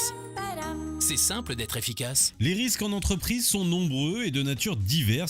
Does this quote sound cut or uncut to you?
cut